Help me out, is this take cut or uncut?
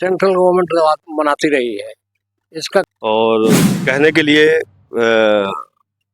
cut